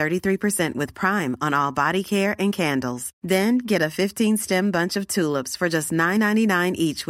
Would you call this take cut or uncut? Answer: uncut